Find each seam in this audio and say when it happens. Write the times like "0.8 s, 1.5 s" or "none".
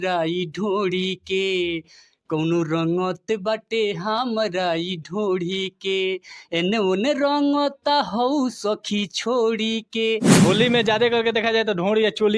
10.4 s